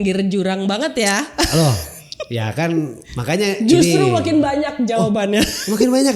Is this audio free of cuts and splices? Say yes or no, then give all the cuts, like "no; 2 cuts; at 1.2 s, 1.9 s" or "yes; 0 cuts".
no; 1 cut; at 3.1 s